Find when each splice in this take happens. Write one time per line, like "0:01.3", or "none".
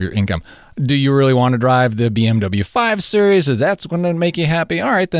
none